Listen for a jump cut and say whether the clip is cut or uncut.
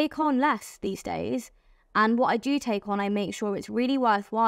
uncut